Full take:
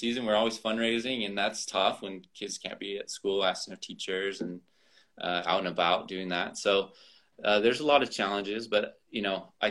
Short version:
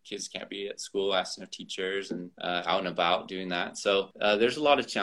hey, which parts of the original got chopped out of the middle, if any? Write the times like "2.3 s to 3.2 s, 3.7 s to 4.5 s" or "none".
4.6 s to 5.1 s, 6.9 s to 7.4 s